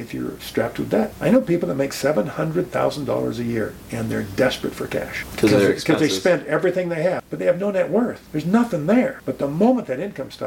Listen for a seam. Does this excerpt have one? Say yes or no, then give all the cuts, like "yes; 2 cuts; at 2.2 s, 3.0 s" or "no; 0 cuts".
yes; 5 cuts; at 1.1 s, 5.2 s, 7.3 s, 8.2 s, 9.2 s